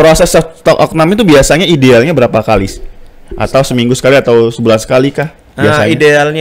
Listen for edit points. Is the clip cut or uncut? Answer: uncut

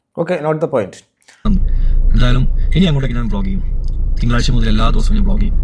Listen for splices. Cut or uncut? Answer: cut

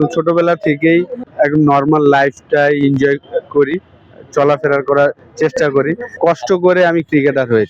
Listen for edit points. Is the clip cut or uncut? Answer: cut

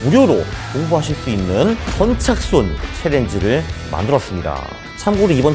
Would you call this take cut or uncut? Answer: uncut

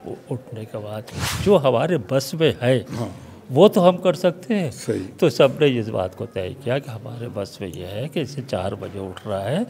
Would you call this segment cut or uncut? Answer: cut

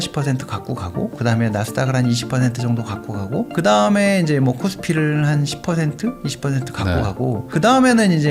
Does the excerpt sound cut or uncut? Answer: uncut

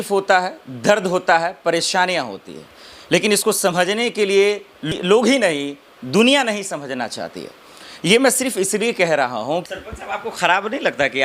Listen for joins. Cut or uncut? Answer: cut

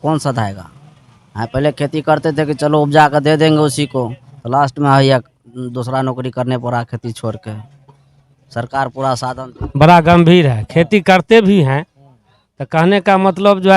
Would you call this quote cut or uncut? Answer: cut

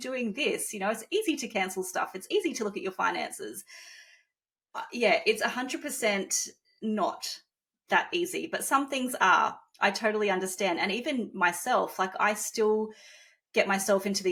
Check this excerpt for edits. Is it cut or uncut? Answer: uncut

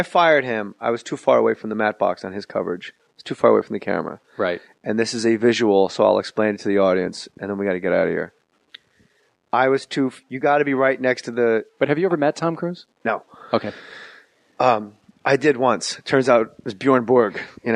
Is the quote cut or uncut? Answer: cut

